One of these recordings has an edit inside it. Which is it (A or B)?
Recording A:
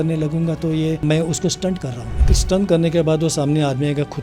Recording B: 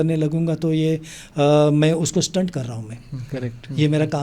A